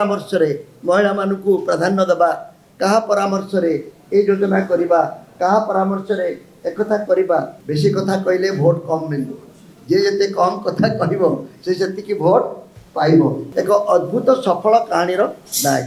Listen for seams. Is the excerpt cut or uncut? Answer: cut